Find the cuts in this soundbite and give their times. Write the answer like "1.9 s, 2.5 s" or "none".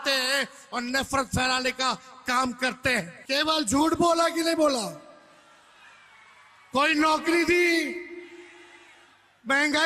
3.2 s